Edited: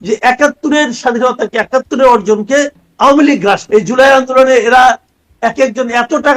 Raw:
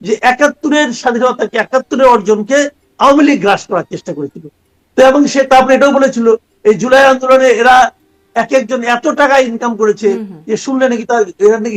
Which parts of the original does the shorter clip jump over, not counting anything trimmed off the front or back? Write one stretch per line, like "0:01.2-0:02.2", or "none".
0:03.6-0:06.6